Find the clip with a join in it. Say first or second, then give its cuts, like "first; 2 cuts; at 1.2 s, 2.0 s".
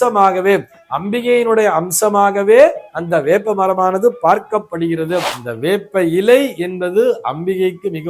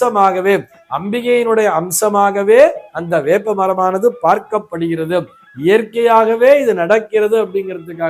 first; 1 cut; at 5.4 s